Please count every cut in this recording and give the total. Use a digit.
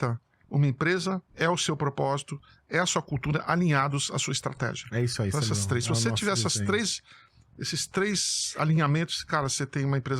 1